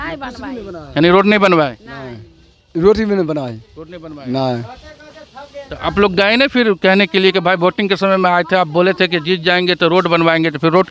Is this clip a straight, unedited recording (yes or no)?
yes